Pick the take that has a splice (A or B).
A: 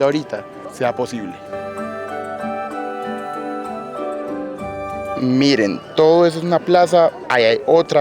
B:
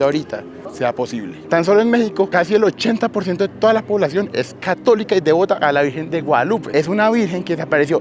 B